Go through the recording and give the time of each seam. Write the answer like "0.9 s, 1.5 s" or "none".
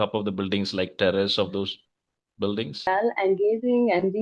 3.2 s